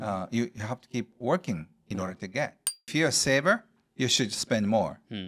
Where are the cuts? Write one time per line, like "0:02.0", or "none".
0:02.9